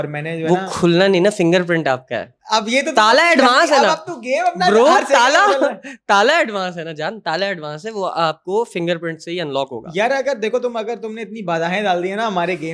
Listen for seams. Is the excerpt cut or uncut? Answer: uncut